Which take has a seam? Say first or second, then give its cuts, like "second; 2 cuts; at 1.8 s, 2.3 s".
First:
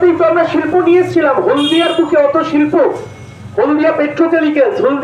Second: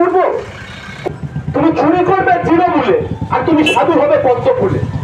second; 1 cut; at 1.1 s